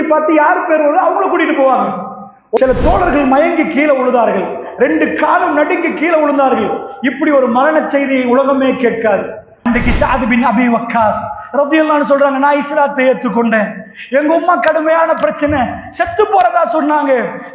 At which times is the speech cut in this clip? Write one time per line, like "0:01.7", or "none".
0:02.6
0:09.5